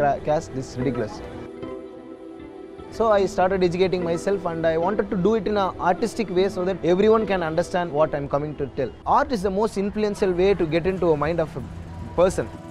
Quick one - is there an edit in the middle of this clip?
no; 0 cuts

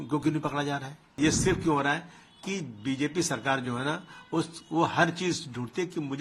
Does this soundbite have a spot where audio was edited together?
yes; 1 cut; at 1.2 s

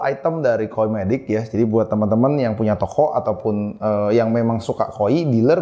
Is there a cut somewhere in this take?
no; 0 cuts

